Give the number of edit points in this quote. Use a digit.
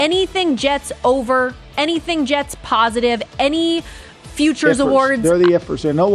0